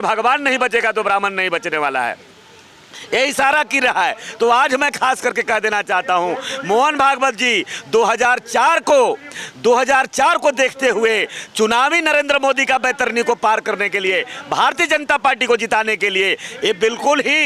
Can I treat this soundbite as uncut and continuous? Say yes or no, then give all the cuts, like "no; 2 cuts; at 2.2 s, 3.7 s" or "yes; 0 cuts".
yes; 0 cuts